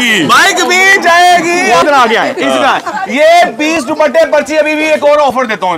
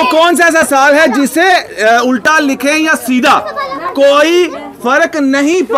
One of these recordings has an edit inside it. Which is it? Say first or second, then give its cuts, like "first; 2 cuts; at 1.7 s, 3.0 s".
first; 1 cut; at 1.8 s